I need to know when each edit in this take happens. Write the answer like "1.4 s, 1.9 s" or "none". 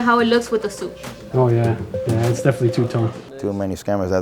2.0 s, 3.2 s